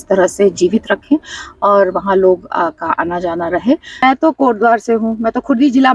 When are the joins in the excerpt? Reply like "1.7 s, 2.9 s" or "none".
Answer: 4.0 s